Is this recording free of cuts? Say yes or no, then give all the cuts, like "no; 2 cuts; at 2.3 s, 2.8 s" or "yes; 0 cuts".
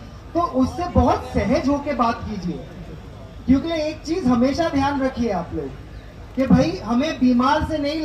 yes; 0 cuts